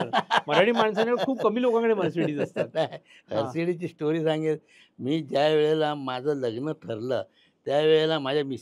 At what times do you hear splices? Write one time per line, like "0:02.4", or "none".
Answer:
none

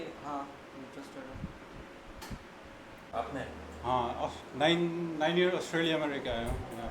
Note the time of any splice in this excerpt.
0:03.0

